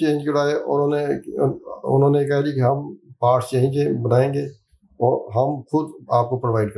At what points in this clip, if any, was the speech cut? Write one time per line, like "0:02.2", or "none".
none